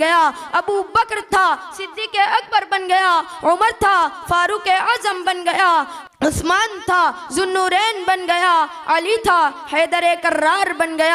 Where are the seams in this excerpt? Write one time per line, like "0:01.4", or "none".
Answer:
0:06.0